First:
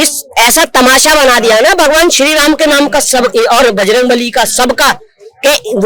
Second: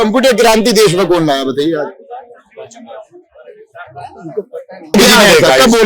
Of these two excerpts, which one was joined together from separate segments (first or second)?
second